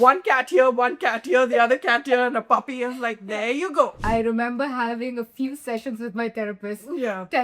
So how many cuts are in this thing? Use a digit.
1